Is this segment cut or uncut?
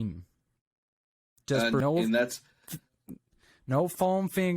cut